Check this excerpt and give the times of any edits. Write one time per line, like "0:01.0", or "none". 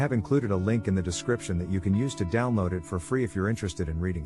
none